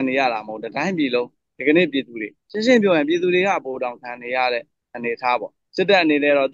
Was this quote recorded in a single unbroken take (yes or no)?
yes